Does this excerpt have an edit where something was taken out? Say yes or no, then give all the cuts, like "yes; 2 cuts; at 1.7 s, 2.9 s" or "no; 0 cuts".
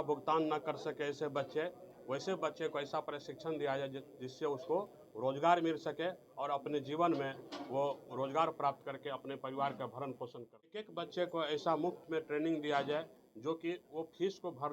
yes; 1 cut; at 10.9 s